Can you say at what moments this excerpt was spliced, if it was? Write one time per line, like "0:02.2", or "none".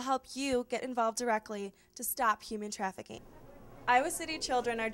0:03.4

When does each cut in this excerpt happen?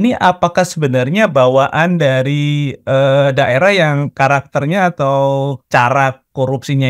0:05.6

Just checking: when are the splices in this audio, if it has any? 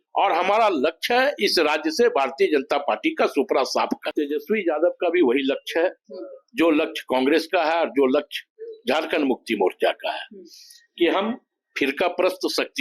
0:04.1

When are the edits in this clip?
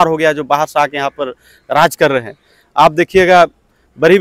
none

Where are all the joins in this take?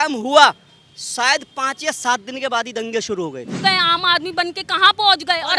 0:03.6

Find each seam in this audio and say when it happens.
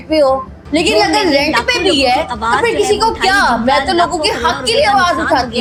none

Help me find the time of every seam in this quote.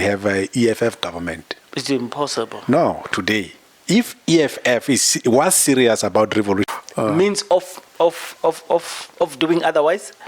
0:06.8

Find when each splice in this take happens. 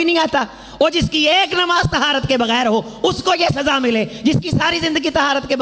none

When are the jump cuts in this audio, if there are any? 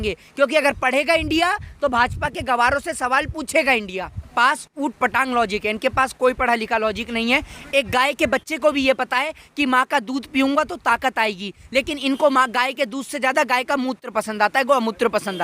0:04.3

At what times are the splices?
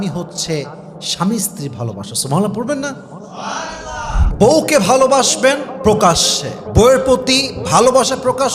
0:04.2

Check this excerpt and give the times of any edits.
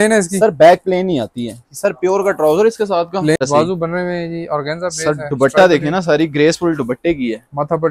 0:03.4

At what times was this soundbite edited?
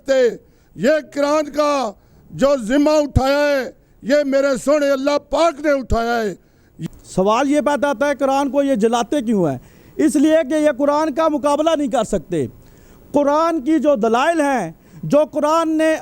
0:06.8

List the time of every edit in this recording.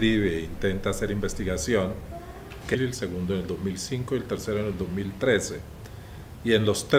none

